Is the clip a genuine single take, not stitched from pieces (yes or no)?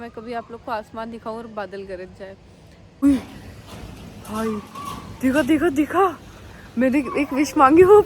no